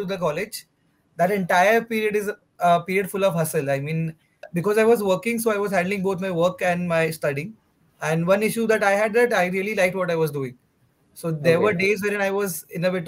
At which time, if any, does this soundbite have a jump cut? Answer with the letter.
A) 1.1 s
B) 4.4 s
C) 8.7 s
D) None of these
B